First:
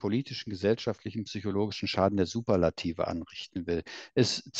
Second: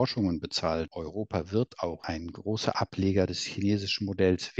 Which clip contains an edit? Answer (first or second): second